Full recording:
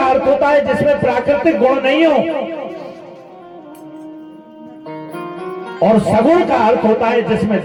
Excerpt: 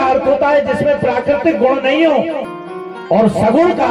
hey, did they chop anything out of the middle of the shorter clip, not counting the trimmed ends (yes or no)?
yes